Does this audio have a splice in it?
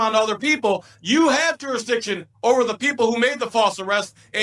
no; 0 cuts

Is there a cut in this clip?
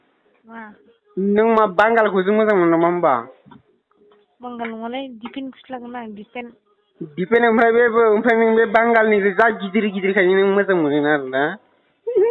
no; 0 cuts

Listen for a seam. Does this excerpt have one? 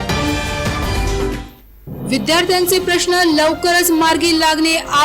yes; 1 cut; at 1.4 s

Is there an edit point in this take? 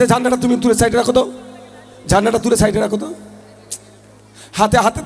no; 0 cuts

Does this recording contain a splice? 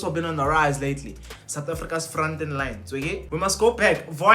yes; 1 cut; at 3.2 s

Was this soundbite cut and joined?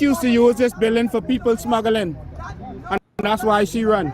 no; 0 cuts

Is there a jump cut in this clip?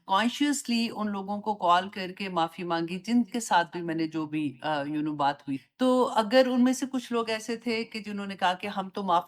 no; 0 cuts

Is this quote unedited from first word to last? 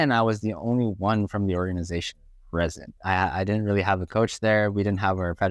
no; 1 cut; at 3.0 s

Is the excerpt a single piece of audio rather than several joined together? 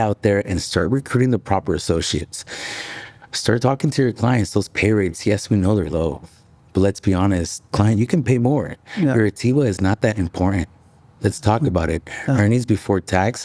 yes; 0 cuts

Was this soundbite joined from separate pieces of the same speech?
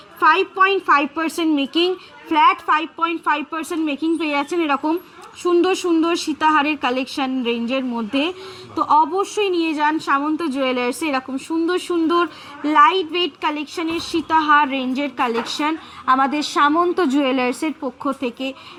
no; 0 cuts

